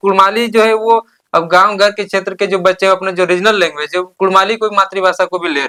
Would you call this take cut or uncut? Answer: uncut